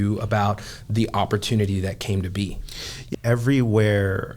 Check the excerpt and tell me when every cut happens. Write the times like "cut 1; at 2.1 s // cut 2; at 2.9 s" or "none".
cut 1; at 3.0 s